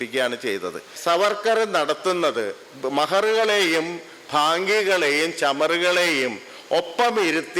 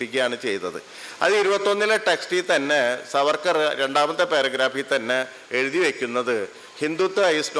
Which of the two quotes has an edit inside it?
first; 1 cut; at 0.9 s

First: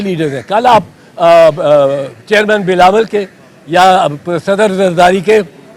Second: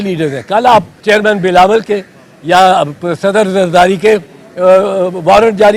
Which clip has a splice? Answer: second; 1 cut; at 0.9 s

